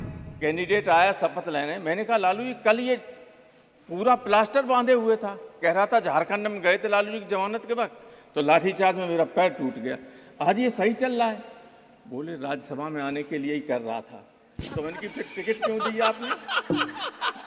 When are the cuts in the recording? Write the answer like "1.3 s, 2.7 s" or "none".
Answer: none